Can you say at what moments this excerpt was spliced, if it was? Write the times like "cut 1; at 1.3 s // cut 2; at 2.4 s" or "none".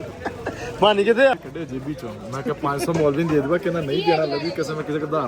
cut 1; at 1.3 s